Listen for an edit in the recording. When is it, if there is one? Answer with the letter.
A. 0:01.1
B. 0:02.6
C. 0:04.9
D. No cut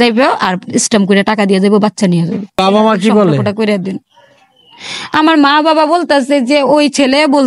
B